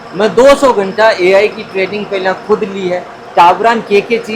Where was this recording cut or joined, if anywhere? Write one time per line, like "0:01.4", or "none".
0:03.2

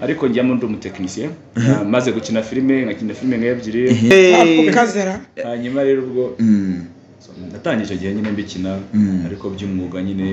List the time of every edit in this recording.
0:04.1

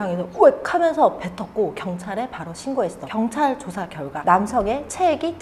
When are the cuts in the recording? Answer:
none

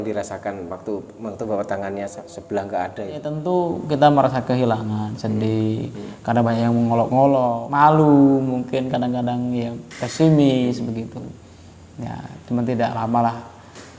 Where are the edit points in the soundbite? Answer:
0:03.2
0:07.6

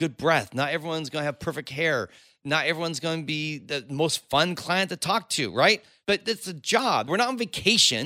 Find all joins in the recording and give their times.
0:05.9
0:07.1

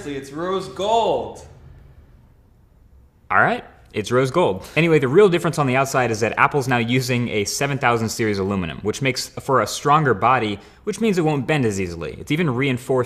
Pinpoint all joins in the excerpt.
none

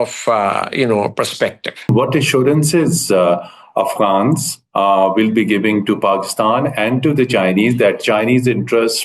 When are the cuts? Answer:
0:01.9

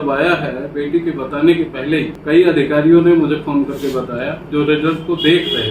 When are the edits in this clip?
0:02.2

